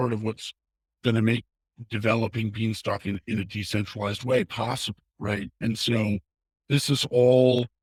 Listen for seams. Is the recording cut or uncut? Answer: uncut